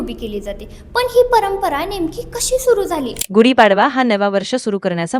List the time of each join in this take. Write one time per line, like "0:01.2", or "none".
0:03.2